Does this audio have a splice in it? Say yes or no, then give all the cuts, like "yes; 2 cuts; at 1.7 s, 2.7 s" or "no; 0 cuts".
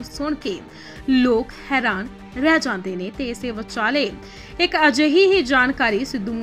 no; 0 cuts